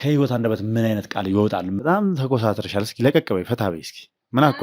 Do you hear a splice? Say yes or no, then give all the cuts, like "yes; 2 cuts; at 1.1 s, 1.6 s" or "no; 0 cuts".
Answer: yes; 1 cut; at 1.8 s